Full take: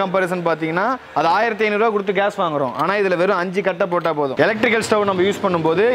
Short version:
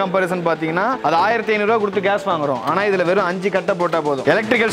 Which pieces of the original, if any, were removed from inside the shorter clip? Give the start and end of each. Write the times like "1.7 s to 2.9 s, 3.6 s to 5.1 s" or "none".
1.0 s to 1.1 s